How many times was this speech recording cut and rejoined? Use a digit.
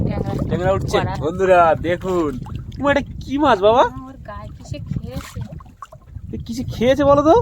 1